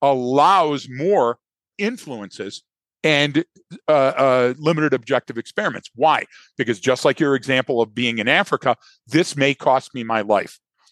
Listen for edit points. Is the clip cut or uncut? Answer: cut